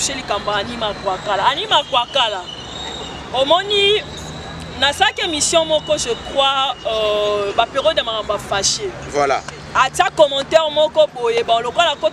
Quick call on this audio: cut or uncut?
uncut